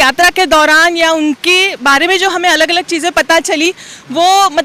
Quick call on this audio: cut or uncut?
uncut